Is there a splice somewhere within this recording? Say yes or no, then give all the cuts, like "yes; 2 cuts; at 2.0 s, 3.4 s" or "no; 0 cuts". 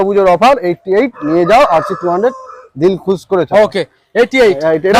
no; 0 cuts